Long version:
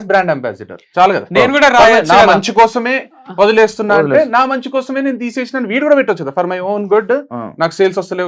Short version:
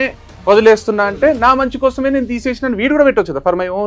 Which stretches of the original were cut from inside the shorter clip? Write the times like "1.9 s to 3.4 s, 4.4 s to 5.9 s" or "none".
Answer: none